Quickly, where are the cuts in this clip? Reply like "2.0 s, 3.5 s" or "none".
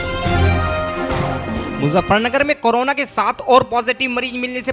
1.6 s